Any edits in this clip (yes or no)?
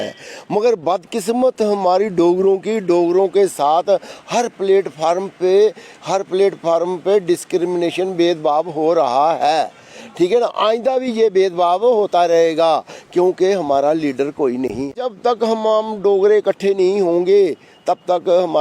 yes